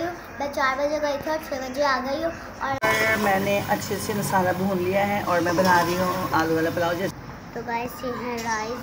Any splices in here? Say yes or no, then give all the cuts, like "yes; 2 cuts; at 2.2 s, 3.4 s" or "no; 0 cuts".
yes; 2 cuts; at 2.8 s, 7.1 s